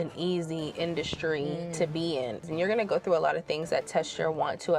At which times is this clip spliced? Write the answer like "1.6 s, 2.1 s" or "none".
2.5 s